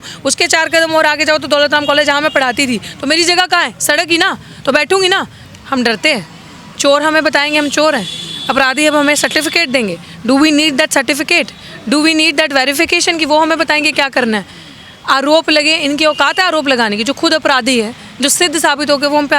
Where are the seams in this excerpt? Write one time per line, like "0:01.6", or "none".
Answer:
0:05.4